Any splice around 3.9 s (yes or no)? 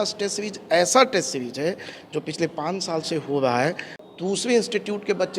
yes